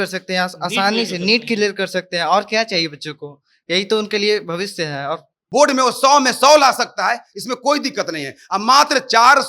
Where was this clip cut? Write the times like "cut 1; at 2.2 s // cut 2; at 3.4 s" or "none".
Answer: cut 1; at 5.4 s